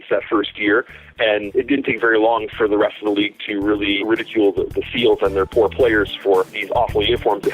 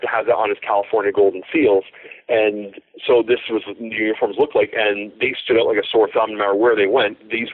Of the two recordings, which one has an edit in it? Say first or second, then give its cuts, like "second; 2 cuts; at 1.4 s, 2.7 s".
first; 3 cuts; at 1.5 s, 4.0 s, 6.6 s